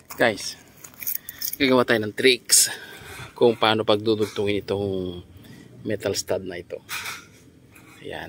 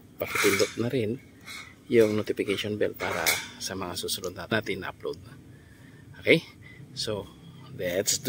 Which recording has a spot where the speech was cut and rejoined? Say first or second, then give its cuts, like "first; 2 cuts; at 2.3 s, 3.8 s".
second; 1 cut; at 4.5 s